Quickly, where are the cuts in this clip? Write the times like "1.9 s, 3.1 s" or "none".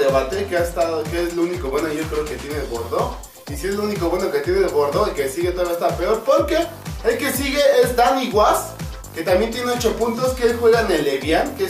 1.0 s